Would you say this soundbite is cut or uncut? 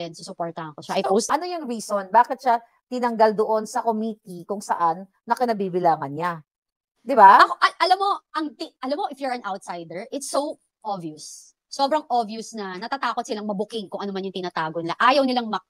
cut